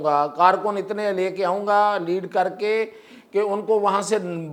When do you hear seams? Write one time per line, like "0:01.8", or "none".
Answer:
none